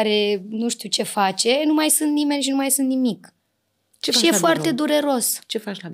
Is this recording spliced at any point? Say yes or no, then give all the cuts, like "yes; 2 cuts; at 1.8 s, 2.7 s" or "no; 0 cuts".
no; 0 cuts